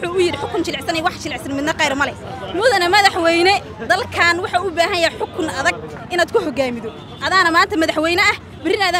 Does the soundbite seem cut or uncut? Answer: uncut